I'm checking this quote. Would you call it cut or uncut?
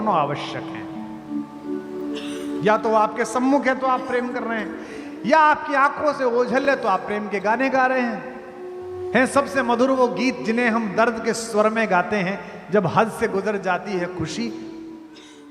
uncut